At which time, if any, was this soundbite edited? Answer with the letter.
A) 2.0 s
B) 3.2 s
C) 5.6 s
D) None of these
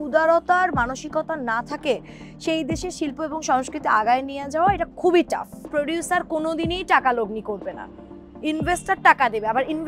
C